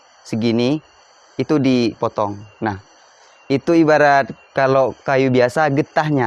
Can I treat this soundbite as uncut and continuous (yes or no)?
yes